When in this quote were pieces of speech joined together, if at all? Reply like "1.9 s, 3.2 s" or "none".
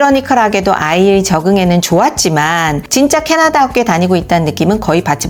none